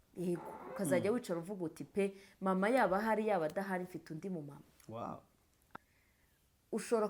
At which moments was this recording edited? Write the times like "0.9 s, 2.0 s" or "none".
5.7 s

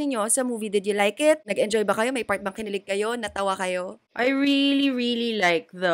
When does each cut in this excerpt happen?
1.5 s, 4.0 s

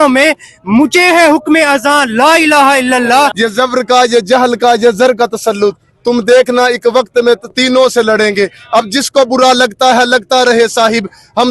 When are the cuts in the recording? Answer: 3.3 s

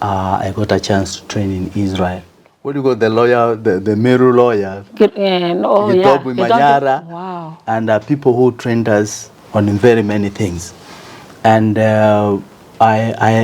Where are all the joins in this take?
2.7 s

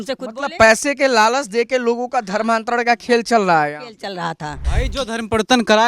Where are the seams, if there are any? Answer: 4.7 s

